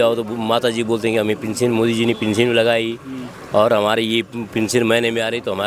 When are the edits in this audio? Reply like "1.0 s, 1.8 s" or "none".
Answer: none